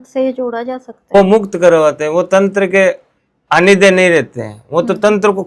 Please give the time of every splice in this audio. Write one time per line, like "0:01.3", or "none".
0:00.9